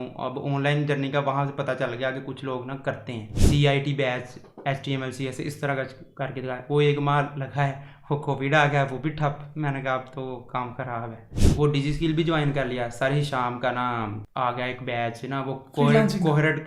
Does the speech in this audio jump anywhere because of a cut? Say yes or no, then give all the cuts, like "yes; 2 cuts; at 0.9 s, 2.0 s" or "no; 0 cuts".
yes; 3 cuts; at 3.3 s, 11.4 s, 14.2 s